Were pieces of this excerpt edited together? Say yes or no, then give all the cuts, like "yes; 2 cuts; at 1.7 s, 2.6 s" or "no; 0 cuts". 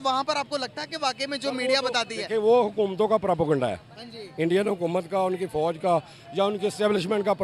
no; 0 cuts